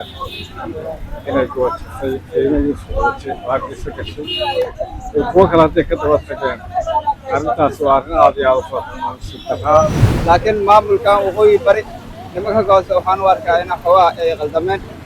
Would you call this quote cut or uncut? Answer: cut